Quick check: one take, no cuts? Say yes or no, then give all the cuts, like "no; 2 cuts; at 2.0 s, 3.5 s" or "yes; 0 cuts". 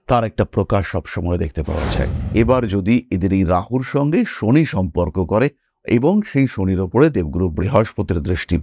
no; 1 cut; at 2.2 s